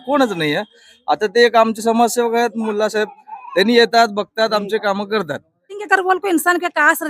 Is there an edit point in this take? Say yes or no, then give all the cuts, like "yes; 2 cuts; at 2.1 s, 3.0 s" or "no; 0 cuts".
yes; 1 cut; at 5.8 s